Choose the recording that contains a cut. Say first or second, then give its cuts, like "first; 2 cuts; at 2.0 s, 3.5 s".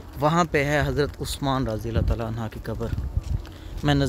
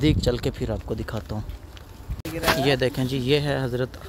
second; 1 cut; at 2.2 s